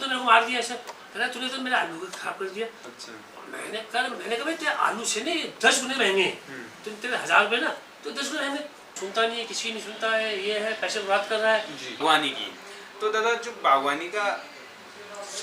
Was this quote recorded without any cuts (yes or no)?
no